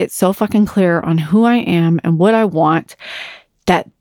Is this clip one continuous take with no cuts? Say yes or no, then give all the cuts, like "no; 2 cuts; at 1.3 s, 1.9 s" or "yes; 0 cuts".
yes; 0 cuts